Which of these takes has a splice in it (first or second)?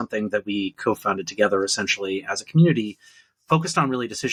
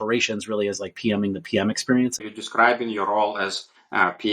second